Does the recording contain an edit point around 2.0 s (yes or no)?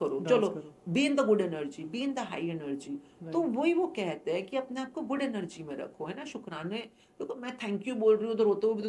no